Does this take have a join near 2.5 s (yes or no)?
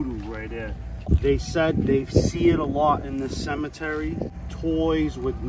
no